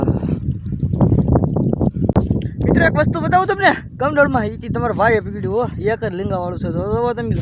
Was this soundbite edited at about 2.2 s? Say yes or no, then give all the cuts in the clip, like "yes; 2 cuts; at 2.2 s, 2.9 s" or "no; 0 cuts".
yes; 1 cut; at 2.2 s